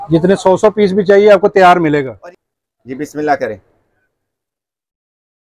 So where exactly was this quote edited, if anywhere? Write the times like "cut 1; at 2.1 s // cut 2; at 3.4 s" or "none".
cut 1; at 2.1 s